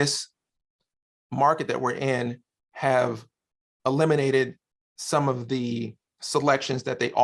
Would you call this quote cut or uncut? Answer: uncut